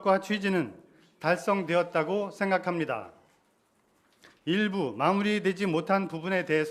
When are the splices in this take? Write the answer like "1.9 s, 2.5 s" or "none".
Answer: 5.7 s